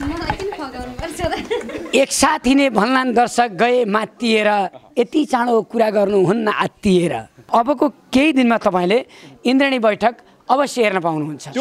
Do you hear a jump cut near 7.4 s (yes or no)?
yes